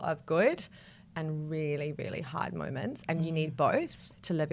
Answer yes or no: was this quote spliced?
no